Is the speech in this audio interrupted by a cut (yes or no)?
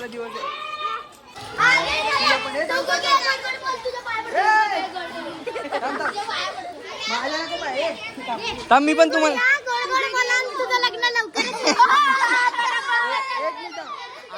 no